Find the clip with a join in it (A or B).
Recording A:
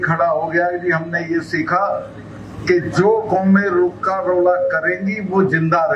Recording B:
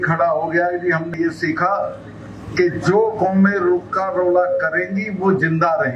B